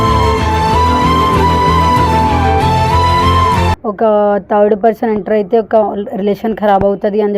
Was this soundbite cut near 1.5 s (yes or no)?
no